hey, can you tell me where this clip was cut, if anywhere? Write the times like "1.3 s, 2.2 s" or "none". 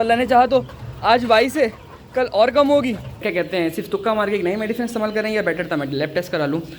3.2 s